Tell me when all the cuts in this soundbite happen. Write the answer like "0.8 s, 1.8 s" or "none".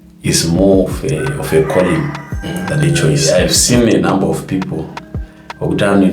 3.2 s